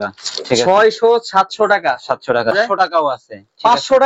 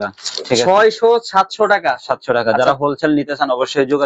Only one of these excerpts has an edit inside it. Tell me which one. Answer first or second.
first